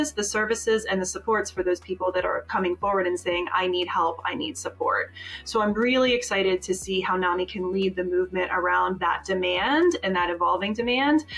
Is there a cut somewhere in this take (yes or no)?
no